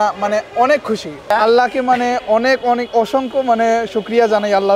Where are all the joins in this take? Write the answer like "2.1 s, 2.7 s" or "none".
1.3 s